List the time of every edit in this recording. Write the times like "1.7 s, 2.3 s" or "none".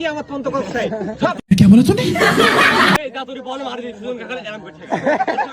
3.0 s